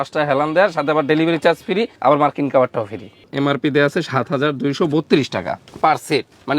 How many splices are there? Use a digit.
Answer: 1